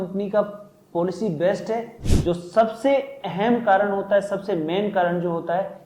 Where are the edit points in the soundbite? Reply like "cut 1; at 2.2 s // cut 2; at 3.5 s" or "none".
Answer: cut 1; at 1.9 s